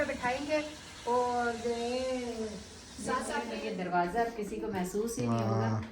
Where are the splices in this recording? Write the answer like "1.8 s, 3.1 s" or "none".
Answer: 3.5 s